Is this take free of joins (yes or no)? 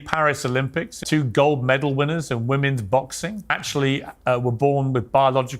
no